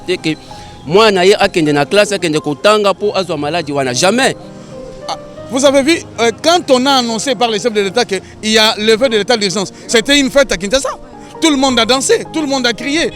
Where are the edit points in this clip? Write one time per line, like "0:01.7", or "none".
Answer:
0:04.4